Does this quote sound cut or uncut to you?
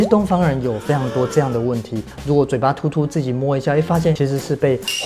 cut